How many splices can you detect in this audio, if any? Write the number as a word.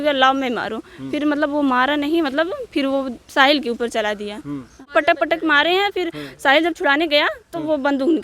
one